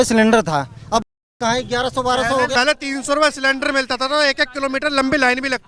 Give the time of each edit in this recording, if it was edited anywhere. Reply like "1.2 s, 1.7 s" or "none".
2.5 s